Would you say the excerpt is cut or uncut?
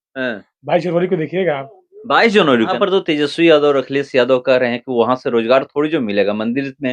cut